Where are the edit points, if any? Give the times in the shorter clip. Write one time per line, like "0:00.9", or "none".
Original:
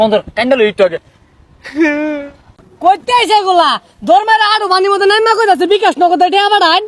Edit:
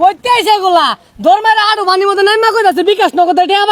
none